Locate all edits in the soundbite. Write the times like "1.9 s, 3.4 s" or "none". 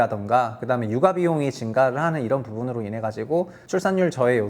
3.6 s